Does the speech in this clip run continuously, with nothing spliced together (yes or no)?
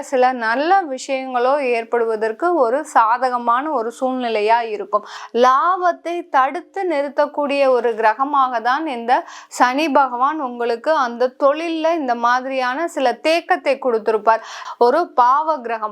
no